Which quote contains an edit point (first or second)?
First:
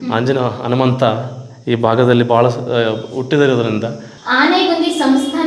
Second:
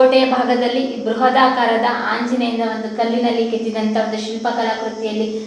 first